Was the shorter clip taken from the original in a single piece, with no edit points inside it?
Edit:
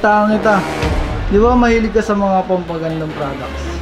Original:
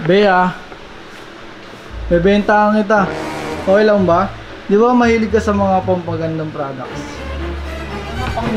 no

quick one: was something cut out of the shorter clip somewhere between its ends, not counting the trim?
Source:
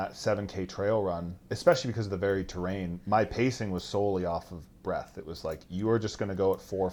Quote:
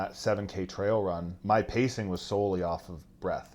yes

